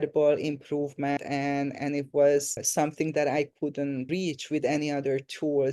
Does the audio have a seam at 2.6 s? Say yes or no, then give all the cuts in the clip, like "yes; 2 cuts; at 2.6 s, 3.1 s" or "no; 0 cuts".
yes; 3 cuts; at 1.2 s, 2.6 s, 4.1 s